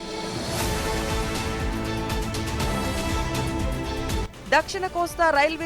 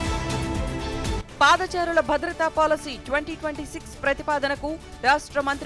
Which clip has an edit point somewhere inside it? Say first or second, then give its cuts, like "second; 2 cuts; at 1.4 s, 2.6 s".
second; 1 cut; at 1.2 s